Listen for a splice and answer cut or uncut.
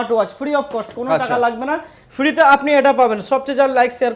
uncut